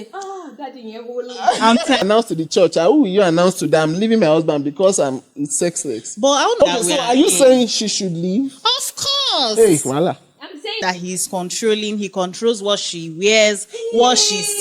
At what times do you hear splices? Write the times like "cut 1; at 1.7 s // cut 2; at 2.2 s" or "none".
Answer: cut 1; at 2.0 s // cut 2; at 6.6 s // cut 3; at 10.8 s